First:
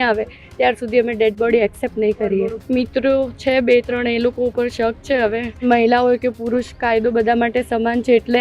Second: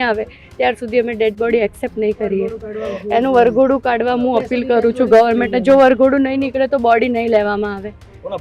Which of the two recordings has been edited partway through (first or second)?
first